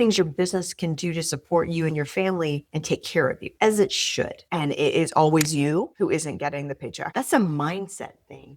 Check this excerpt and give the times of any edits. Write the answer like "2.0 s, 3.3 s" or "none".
4.4 s, 7.1 s